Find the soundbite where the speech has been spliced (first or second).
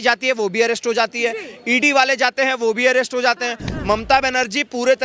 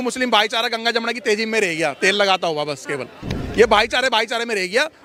first